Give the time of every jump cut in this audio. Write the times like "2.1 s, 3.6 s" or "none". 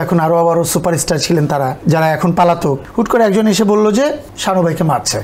1.8 s, 2.8 s, 4.3 s